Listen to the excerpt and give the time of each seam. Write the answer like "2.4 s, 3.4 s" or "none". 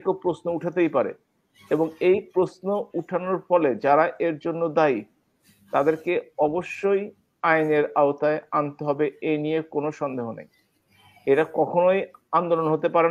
none